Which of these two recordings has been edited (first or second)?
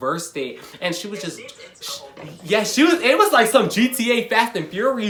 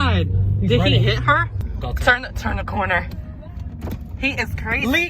second